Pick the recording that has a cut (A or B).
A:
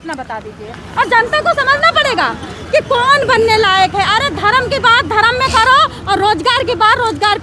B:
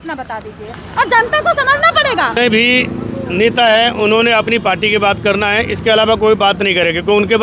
A